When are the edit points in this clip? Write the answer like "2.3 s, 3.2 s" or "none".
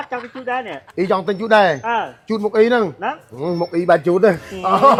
none